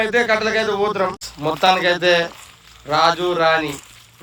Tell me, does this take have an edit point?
yes; 1 cut; at 1.3 s

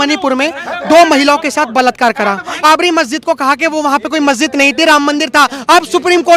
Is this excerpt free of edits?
no; 1 cut; at 2.5 s

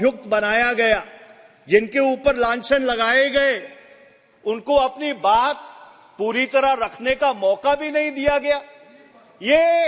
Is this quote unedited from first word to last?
yes; 0 cuts

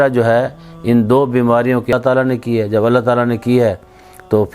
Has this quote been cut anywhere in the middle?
yes; 1 cut; at 1.9 s

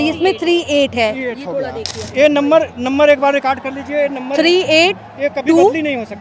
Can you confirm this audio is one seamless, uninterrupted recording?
no; 1 cut; at 1.9 s

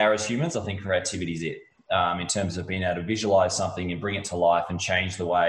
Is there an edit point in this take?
no; 0 cuts

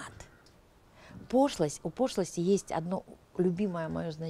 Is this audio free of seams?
yes; 0 cuts

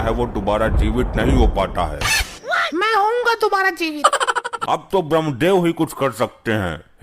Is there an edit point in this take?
yes; 1 cut; at 4.5 s

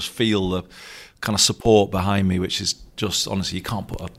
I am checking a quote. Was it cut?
no; 0 cuts

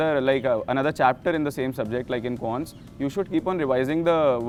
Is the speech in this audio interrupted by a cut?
no; 0 cuts

